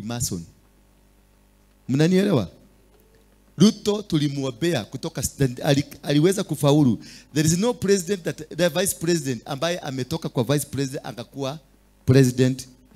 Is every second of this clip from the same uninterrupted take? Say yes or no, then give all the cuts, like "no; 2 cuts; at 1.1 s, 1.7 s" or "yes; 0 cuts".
yes; 0 cuts